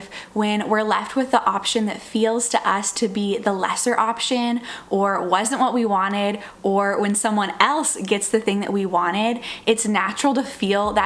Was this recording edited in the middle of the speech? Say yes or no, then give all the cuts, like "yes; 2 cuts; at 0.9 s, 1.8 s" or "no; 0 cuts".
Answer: no; 0 cuts